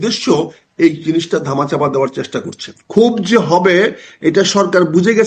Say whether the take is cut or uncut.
cut